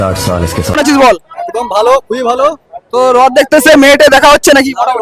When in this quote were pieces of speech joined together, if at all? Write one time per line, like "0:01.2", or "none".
none